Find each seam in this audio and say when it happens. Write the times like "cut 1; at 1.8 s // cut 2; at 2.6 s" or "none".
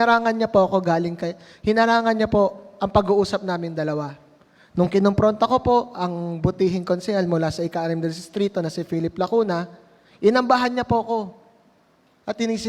none